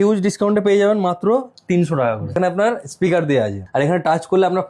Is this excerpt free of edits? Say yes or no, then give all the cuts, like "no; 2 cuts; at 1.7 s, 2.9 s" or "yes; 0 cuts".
no; 2 cuts; at 2.4 s, 3.6 s